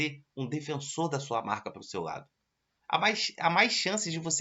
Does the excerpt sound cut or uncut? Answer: uncut